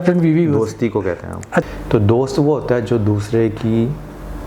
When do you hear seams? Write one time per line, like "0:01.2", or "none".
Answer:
0:01.7